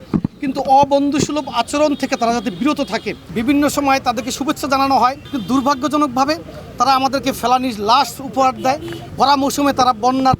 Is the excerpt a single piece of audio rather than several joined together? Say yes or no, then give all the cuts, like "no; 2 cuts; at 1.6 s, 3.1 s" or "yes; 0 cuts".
no; 3 cuts; at 3.2 s, 5.3 s, 9.0 s